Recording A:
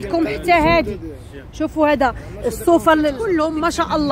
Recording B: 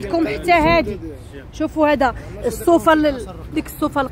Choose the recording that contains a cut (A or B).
A